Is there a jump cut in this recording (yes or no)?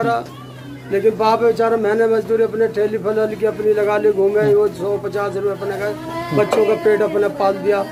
no